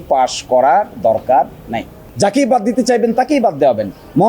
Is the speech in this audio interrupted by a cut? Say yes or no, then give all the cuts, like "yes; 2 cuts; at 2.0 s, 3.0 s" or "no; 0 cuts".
yes; 1 cut; at 2.0 s